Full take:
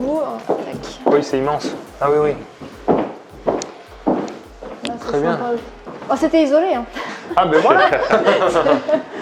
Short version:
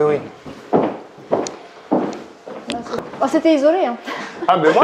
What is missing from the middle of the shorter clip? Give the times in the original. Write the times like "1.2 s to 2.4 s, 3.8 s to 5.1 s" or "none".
5.1 s to 5.8 s